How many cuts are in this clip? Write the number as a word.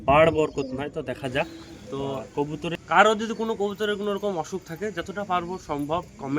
one